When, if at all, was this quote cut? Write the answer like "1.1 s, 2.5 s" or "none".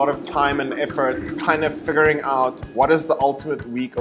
none